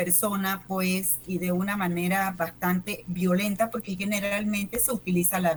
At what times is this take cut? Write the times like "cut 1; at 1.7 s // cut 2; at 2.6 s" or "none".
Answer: none